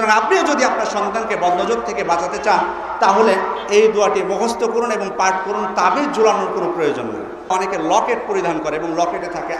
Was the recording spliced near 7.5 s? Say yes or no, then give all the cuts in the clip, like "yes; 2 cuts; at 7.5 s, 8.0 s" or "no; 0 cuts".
yes; 1 cut; at 7.5 s